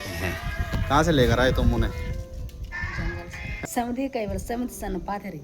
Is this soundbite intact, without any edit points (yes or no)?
no